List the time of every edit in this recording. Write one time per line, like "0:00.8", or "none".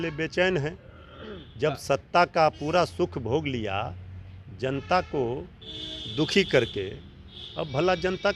none